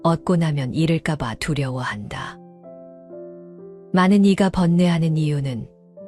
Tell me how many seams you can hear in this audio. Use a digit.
0